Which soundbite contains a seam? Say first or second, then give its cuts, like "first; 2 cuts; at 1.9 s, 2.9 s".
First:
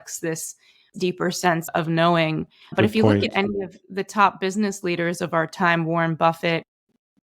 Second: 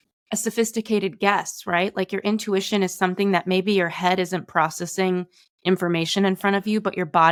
first; 1 cut; at 0.9 s